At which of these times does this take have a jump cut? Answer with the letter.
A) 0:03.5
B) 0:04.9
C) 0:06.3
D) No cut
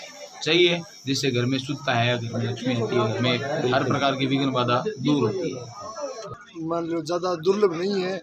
C